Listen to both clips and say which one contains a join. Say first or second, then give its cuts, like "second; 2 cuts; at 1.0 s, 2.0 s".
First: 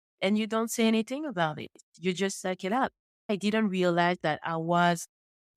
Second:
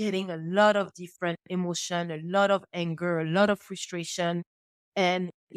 first; 1 cut; at 3.3 s